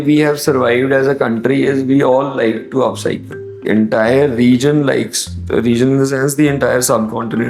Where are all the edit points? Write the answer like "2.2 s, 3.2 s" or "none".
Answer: 3.7 s